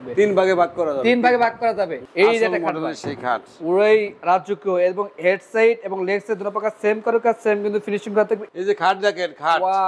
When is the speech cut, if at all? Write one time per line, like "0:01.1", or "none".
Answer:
0:02.1
0:08.4